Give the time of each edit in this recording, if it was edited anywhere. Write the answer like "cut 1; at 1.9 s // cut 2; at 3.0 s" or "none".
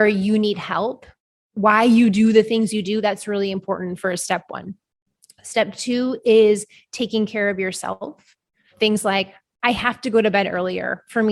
cut 1; at 8.7 s // cut 2; at 9.5 s